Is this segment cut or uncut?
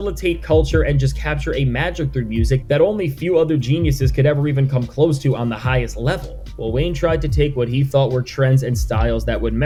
uncut